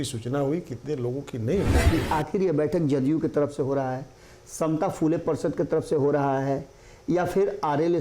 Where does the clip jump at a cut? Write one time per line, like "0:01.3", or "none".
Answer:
0:01.8